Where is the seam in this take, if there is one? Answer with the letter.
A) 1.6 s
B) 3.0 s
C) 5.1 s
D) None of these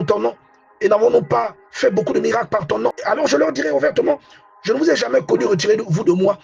B